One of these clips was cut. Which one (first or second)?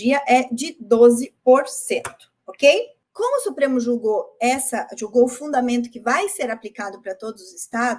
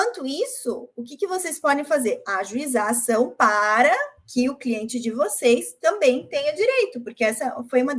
first